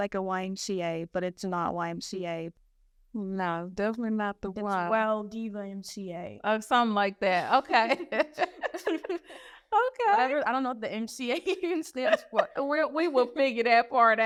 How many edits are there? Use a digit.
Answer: 0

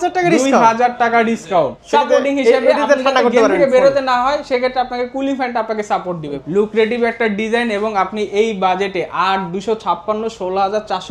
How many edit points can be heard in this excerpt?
2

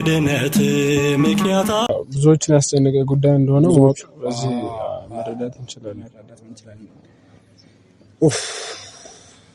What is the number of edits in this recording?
1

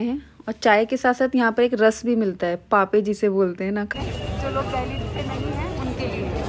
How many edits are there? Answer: 1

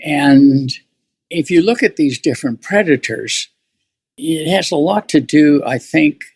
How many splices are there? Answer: 1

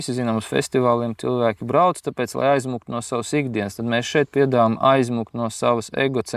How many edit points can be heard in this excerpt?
0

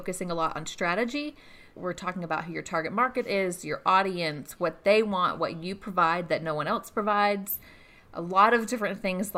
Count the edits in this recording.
1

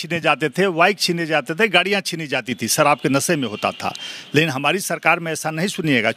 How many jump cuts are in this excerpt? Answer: 0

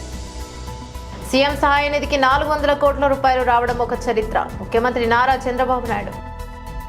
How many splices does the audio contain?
1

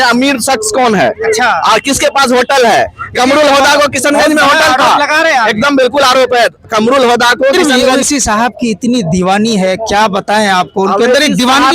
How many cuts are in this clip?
1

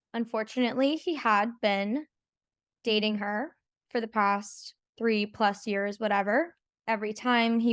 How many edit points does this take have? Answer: 1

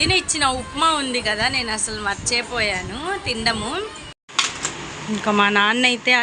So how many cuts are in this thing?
1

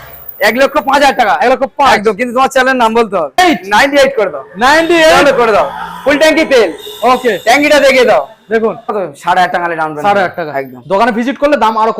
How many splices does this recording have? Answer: 2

